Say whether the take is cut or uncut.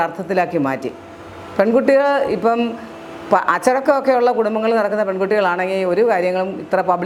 uncut